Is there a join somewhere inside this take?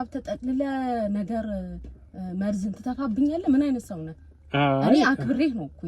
no; 0 cuts

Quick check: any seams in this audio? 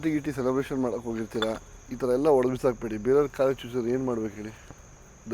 no; 0 cuts

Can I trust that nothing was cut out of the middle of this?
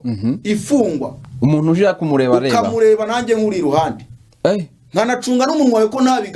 yes; 0 cuts

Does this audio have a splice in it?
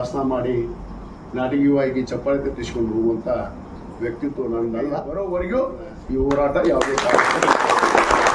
yes; 1 cut; at 5.1 s

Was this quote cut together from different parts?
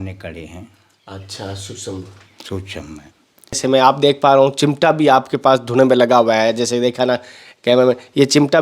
yes; 1 cut; at 3.6 s

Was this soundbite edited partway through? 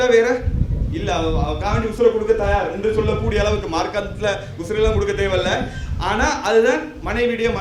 no; 0 cuts

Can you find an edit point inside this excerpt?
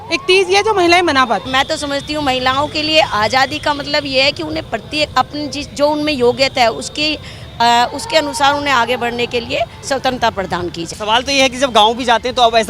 yes; 2 cuts; at 1.5 s, 10.9 s

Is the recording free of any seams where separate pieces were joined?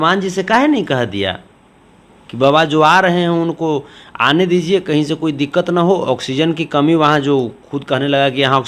yes; 0 cuts

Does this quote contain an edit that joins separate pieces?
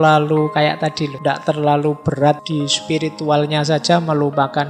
yes; 2 cuts; at 1.1 s, 2.4 s

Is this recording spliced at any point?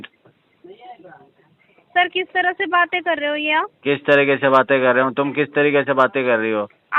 no; 0 cuts

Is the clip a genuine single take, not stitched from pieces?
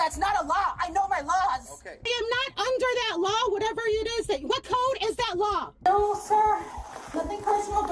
no; 2 cuts; at 2.1 s, 5.8 s

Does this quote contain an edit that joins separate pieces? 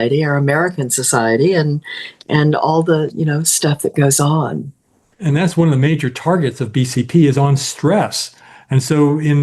no; 0 cuts

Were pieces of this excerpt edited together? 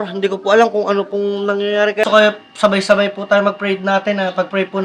yes; 1 cut; at 2.0 s

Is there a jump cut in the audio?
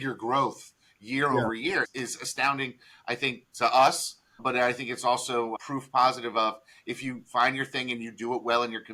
no; 0 cuts

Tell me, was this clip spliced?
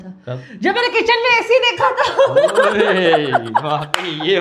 no; 0 cuts

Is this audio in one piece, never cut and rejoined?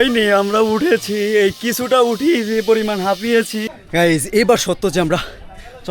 no; 1 cut; at 3.8 s

